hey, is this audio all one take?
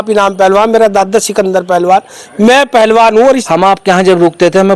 no; 1 cut; at 3.4 s

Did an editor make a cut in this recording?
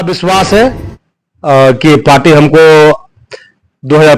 no; 0 cuts

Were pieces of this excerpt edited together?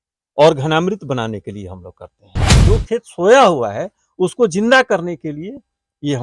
yes; 1 cut; at 2.6 s

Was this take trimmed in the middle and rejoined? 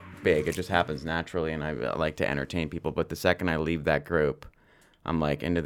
no; 0 cuts

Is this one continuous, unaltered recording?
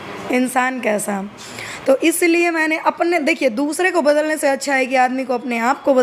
yes; 0 cuts

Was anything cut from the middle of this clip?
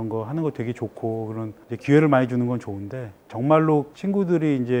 no; 0 cuts

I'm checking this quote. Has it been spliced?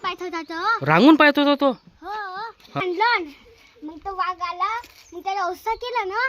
yes; 1 cut; at 2.8 s

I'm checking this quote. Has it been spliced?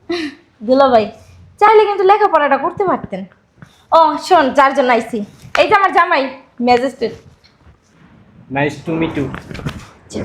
no; 0 cuts

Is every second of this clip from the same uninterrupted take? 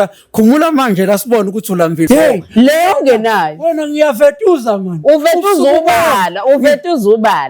no; 1 cut; at 2.1 s

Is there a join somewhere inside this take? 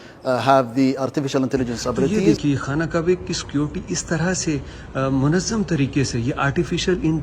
yes; 1 cut; at 2.2 s

